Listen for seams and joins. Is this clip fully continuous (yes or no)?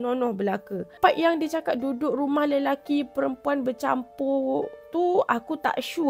no